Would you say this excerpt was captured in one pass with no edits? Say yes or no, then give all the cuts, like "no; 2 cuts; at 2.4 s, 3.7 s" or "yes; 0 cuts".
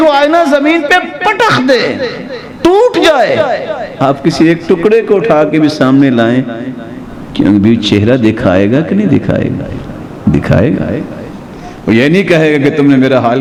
yes; 0 cuts